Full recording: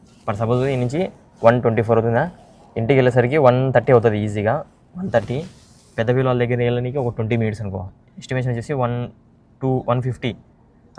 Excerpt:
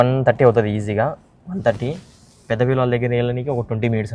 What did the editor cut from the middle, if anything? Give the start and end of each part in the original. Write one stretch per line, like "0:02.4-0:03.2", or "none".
none

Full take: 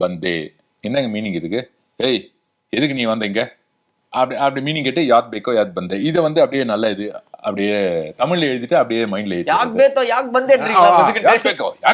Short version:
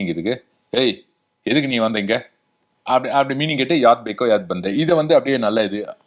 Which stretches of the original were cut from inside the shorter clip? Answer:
none

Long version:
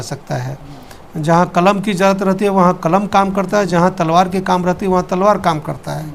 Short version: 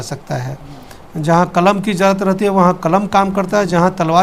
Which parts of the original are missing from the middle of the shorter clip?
none

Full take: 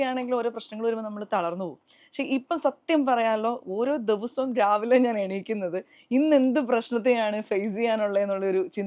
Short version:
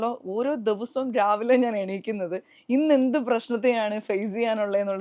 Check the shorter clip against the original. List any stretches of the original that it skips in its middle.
none

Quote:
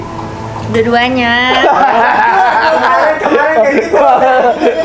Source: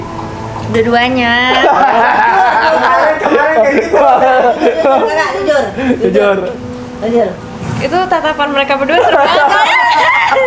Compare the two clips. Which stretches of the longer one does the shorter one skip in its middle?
none

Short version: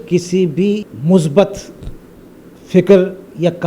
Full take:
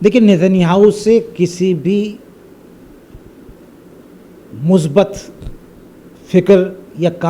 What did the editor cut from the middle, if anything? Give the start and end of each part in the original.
0:02.2-0:04.5

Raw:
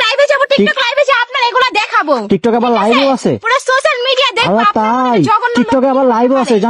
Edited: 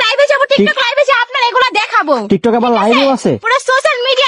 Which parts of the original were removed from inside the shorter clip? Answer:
none

